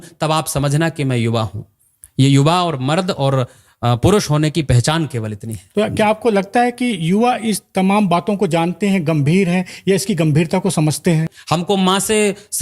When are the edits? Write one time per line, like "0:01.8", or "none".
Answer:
0:05.6
0:11.4